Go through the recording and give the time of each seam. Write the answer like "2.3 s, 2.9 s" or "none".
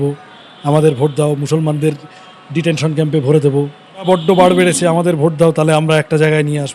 4.1 s